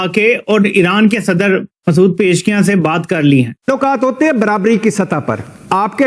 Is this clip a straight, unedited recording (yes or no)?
no